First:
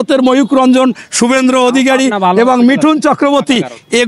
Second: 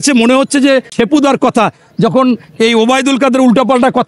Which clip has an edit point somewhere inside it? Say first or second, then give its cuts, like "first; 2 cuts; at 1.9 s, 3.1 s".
second; 1 cut; at 0.9 s